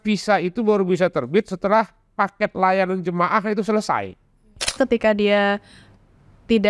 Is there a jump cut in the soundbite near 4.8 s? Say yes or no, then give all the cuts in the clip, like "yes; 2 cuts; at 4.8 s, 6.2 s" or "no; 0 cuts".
yes; 1 cut; at 4.8 s